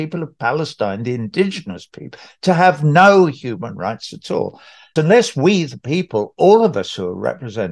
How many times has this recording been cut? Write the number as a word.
one